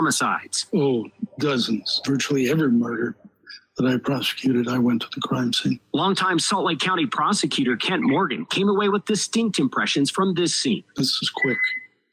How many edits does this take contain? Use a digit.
1